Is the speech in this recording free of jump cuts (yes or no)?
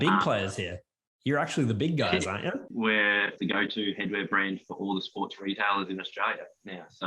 no